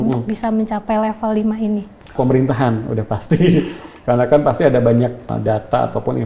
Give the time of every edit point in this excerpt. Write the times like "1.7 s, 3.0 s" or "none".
2.1 s, 5.3 s